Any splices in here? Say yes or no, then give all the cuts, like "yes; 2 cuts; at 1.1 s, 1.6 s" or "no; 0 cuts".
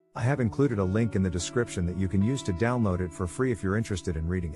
no; 0 cuts